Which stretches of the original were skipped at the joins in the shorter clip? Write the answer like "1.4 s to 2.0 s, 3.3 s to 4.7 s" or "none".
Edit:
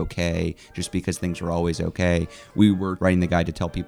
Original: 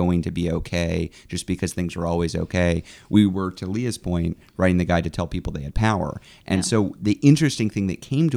3.5 s to 4.5 s